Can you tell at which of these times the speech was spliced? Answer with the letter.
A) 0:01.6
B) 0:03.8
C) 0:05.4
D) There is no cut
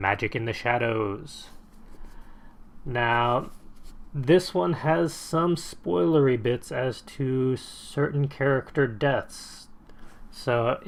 D